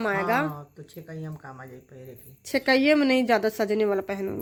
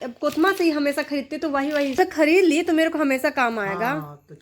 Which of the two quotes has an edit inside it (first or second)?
second